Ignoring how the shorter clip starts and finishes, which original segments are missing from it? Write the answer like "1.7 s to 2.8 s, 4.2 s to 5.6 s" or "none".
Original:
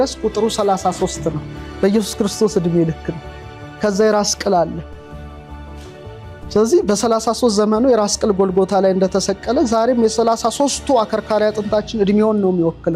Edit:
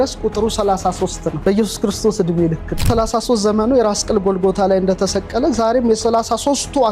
1.3 s to 1.6 s, 3.2 s to 7.0 s